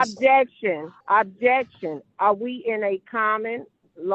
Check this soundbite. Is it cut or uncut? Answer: cut